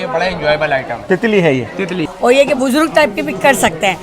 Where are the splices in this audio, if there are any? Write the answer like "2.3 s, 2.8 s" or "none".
2.0 s